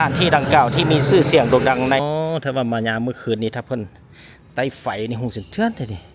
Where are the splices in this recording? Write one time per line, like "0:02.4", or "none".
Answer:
0:02.0